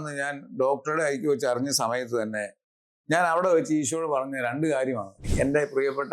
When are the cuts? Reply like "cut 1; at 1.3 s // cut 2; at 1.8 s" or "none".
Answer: cut 1; at 5.2 s